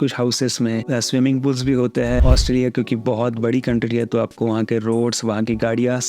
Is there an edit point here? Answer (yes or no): yes